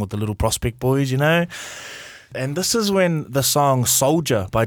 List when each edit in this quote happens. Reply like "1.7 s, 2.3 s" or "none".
2.3 s